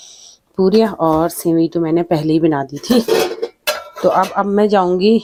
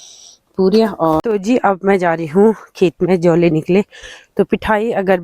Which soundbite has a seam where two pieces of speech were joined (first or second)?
second